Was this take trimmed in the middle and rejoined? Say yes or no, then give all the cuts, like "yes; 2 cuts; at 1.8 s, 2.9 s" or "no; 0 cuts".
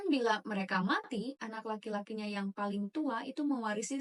no; 0 cuts